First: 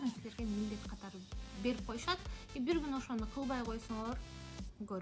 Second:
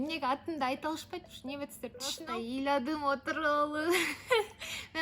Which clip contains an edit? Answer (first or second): second